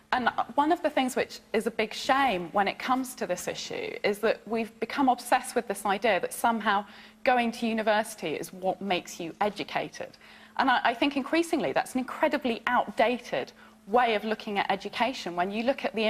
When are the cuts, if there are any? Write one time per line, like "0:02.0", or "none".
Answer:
0:04.4